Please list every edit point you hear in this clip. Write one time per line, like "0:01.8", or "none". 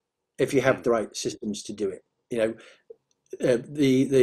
none